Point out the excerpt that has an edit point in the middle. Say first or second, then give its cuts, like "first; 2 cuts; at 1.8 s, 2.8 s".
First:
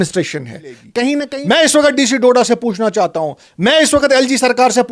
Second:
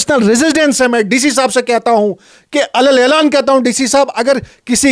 first; 1 cut; at 1.2 s